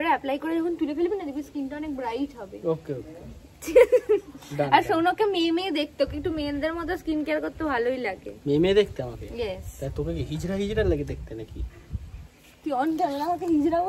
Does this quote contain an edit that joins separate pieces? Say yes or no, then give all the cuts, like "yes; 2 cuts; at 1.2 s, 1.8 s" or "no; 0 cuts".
no; 0 cuts